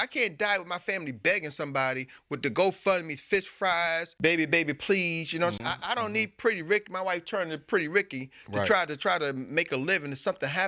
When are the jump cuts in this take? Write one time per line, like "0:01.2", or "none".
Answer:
0:04.1